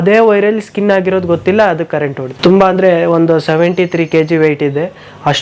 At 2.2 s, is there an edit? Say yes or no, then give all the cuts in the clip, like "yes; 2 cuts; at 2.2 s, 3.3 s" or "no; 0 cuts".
yes; 1 cut; at 2.2 s